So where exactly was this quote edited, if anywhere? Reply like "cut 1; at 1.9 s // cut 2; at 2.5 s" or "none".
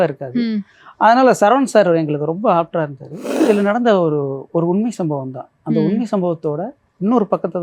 cut 1; at 3.2 s